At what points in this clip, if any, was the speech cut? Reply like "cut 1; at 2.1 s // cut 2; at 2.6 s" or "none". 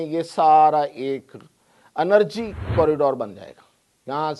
cut 1; at 2.6 s